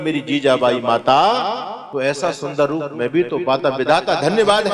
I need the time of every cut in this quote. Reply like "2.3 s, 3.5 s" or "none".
1.8 s